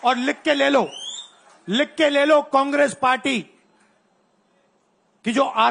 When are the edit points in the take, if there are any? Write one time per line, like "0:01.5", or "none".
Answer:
none